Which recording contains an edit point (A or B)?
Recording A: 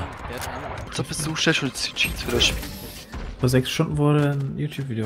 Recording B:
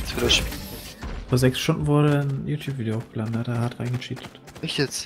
A